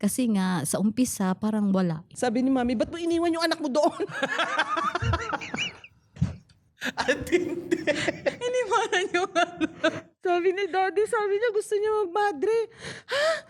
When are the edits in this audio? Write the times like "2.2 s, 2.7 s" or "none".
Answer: 2.1 s